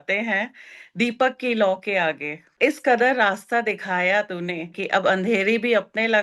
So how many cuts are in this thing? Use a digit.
2